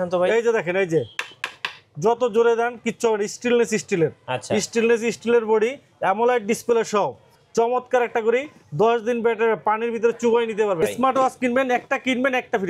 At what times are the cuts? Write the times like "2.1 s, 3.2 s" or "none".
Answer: 10.8 s